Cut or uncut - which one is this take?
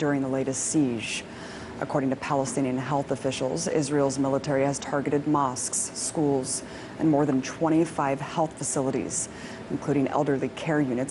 cut